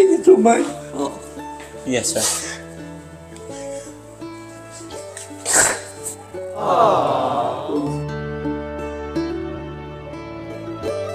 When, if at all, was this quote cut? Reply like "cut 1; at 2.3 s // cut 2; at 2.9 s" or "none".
cut 1; at 10.2 s